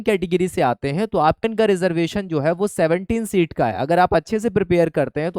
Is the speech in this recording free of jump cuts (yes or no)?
no